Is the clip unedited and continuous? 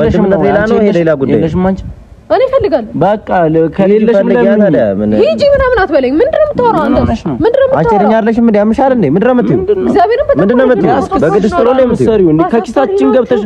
yes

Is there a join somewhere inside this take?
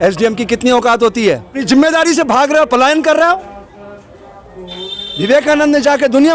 yes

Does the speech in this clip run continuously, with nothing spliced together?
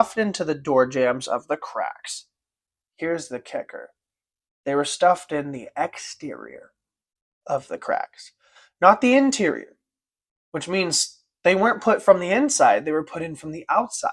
yes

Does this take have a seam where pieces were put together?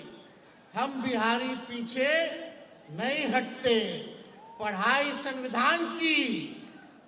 no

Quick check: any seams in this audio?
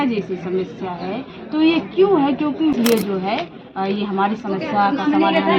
yes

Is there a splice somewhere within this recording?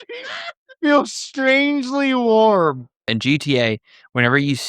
yes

